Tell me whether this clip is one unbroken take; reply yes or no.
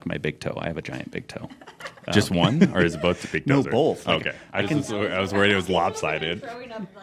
yes